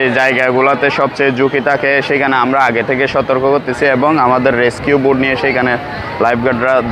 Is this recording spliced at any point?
no; 0 cuts

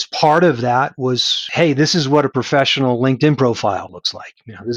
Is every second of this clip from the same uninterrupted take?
no; 2 cuts; at 1.3 s, 3.9 s

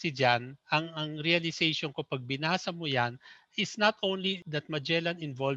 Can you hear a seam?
yes; 1 cut; at 4.4 s

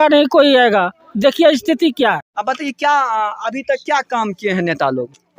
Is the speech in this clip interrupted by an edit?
yes; 1 cut; at 2.3 s

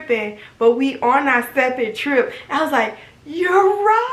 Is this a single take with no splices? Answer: yes; 0 cuts

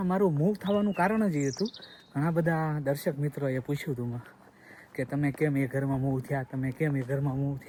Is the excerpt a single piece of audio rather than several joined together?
yes; 0 cuts

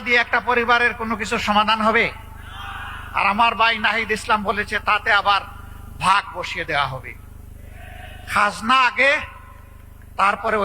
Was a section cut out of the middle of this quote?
no; 0 cuts

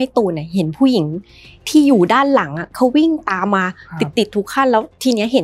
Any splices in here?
no; 0 cuts

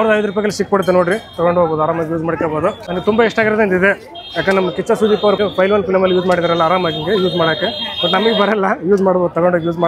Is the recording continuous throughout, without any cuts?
no; 2 cuts; at 2.9 s, 5.4 s

